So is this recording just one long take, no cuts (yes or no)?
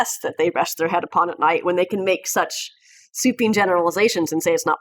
yes